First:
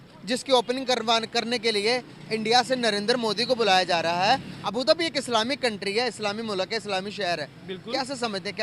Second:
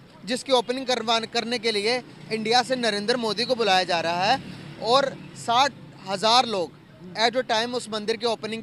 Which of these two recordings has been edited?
first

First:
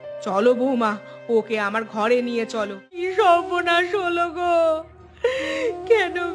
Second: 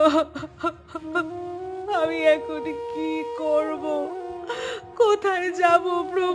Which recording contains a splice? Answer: first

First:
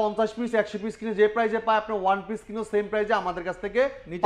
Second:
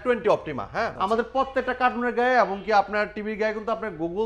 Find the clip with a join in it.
second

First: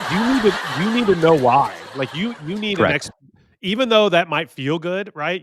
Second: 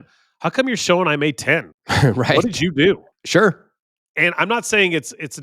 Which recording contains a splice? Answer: second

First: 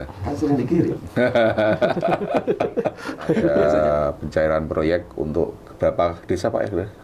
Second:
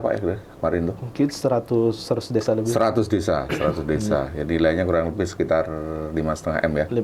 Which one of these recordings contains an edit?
first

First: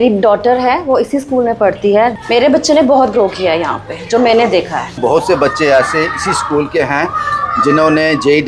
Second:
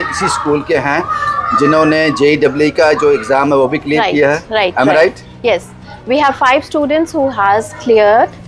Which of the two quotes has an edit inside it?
first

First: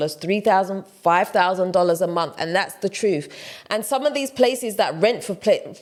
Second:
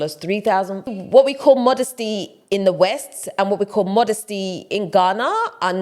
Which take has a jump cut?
second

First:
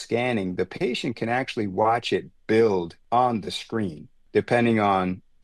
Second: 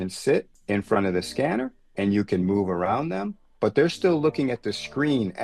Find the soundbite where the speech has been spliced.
first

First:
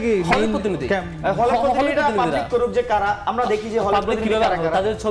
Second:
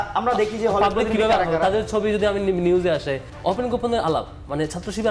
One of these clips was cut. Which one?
second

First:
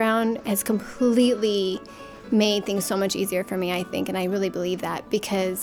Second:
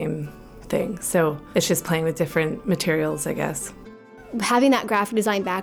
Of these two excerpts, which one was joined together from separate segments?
second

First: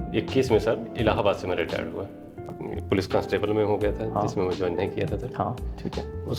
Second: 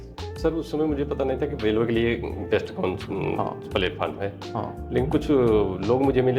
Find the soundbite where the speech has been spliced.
first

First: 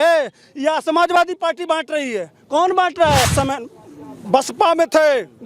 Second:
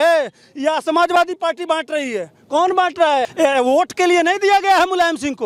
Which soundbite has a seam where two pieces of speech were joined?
first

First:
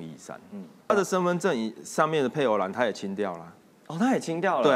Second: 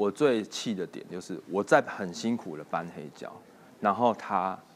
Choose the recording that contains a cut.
first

